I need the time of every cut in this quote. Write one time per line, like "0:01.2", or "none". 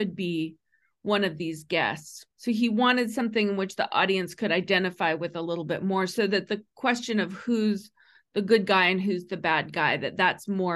0:02.1